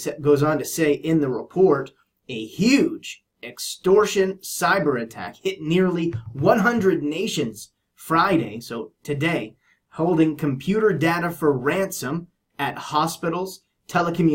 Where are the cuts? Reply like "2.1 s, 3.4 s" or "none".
none